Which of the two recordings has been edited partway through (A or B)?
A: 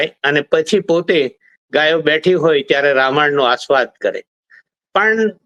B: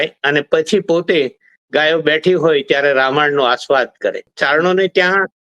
B